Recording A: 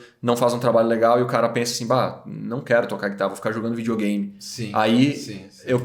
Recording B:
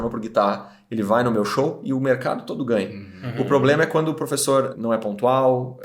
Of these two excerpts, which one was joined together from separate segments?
B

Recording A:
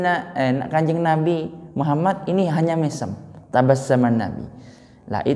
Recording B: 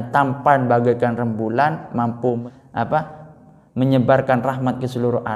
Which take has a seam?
B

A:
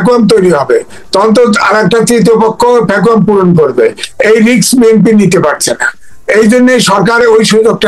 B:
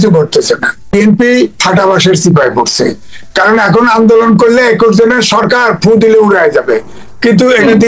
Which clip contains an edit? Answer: B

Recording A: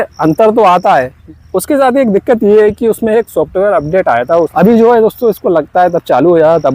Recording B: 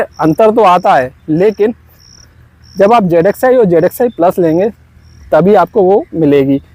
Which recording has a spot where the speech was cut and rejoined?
A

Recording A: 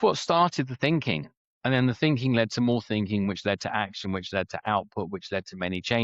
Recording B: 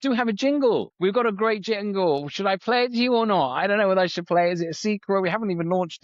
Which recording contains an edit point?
B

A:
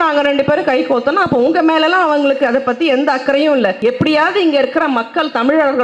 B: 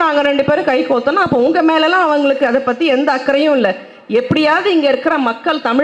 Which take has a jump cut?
A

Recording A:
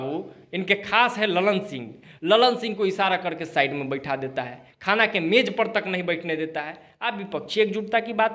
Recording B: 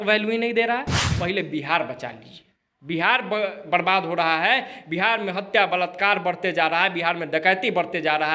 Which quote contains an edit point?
B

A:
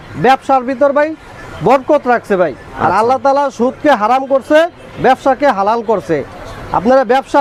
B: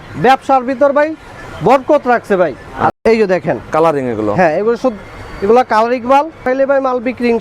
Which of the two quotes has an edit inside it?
B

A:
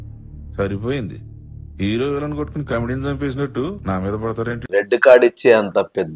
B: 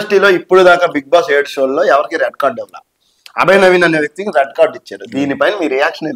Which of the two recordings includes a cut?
A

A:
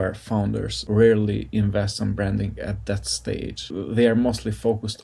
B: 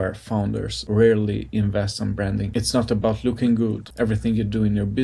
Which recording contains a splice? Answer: B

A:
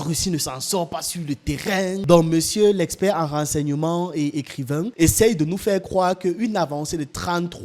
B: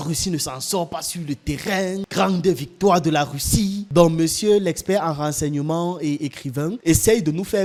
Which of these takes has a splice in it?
A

